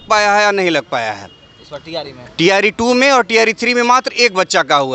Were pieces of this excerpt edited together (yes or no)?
no